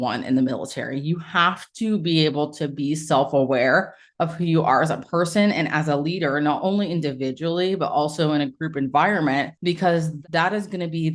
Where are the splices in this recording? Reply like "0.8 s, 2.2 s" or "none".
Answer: 9.9 s